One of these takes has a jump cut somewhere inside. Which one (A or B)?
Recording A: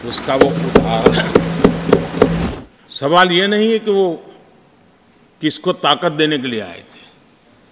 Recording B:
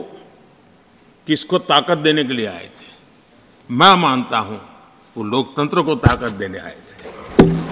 A